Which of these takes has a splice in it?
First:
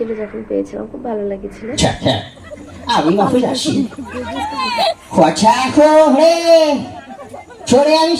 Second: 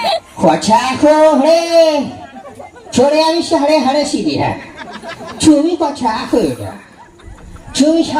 first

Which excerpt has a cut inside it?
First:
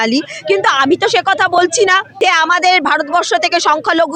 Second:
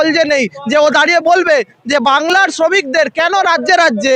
first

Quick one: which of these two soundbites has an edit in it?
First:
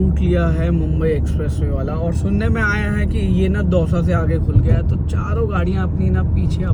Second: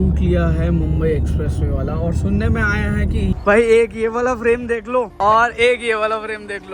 second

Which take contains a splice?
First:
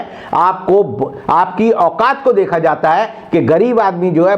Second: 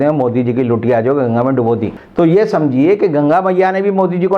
second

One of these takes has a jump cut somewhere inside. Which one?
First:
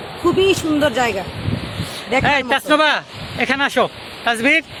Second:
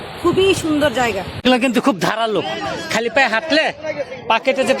second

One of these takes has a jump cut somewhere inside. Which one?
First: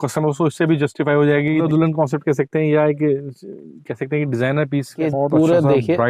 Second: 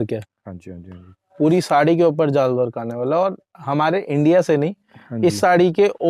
first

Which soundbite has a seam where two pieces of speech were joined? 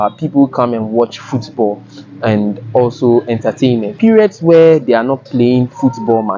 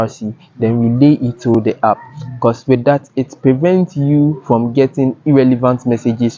first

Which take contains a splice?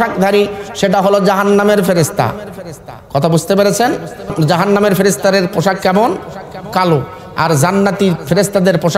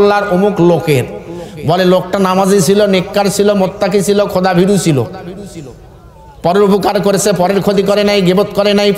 first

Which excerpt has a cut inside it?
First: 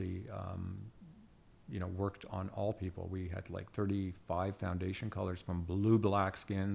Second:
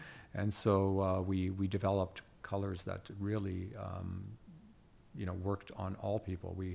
second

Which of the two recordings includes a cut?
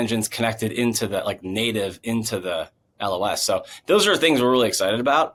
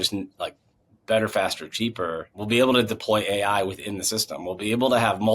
second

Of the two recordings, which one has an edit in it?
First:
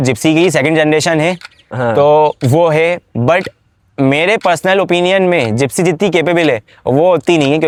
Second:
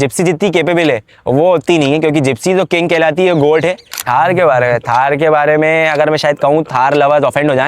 second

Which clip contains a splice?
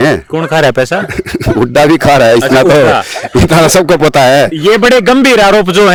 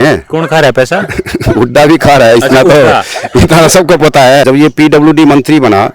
second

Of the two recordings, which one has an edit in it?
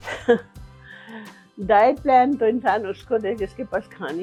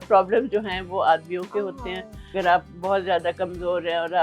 second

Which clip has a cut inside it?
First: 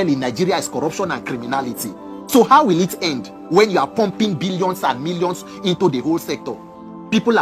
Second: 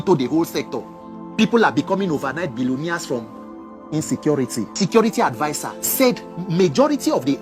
second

